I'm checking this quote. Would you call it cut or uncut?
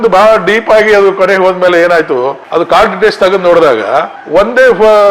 cut